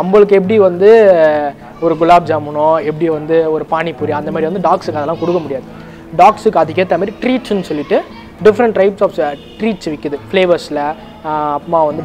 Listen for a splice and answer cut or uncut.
uncut